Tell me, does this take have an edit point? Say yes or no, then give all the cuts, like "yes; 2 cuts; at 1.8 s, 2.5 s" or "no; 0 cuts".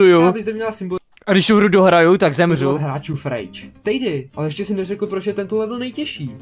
no; 0 cuts